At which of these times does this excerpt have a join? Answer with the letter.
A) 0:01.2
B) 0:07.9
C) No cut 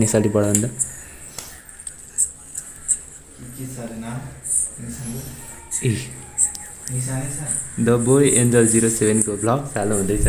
C